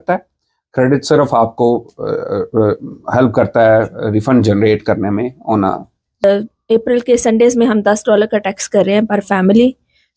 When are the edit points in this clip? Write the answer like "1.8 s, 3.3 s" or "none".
6.2 s